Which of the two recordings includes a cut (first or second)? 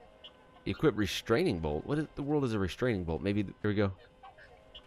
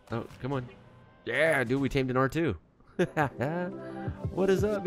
first